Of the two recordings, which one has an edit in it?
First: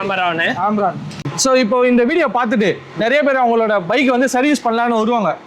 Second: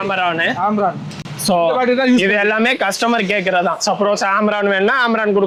first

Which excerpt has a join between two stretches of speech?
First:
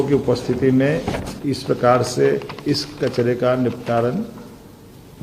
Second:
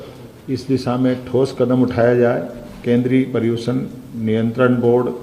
second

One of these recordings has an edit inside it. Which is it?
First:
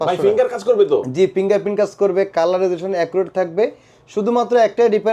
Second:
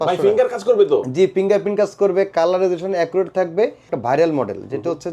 second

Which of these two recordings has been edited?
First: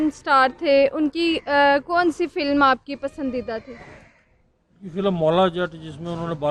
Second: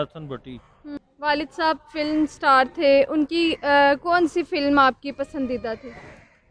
second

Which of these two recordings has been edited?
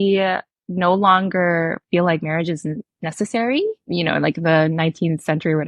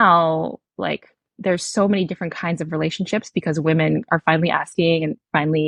first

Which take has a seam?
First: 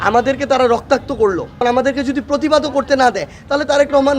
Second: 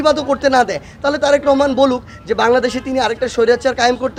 first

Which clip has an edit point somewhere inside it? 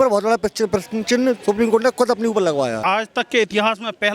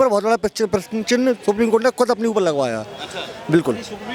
first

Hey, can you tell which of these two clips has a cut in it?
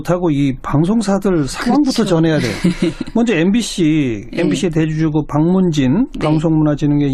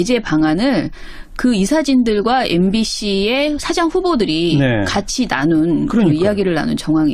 second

